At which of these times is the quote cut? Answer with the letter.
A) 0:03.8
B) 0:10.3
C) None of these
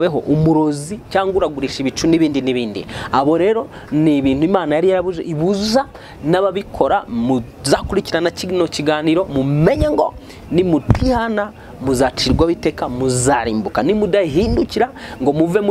C